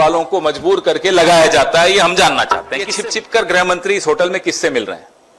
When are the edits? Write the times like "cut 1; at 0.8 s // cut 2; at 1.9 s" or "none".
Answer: cut 1; at 2.8 s